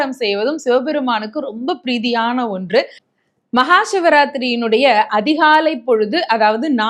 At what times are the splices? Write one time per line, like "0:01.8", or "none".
0:03.0